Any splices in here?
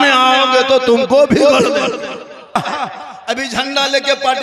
yes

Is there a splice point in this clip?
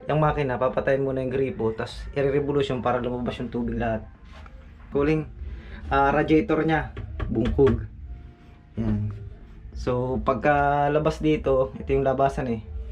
yes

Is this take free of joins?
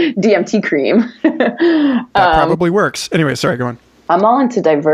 no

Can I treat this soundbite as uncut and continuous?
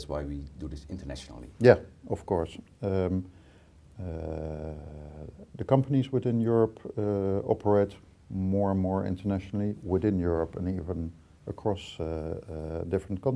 no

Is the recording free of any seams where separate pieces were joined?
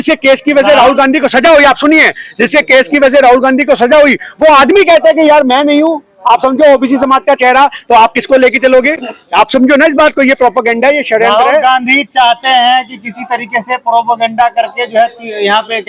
yes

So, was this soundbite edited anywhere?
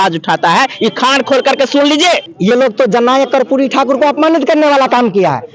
yes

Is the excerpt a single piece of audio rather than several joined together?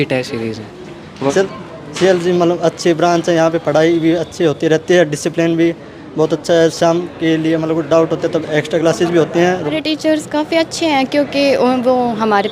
no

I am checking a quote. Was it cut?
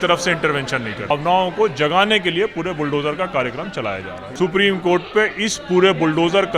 yes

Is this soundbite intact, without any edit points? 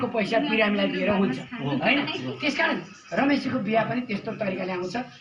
yes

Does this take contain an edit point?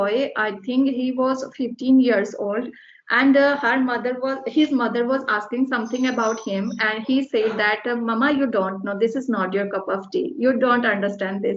no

